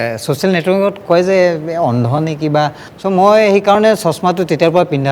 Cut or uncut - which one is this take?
cut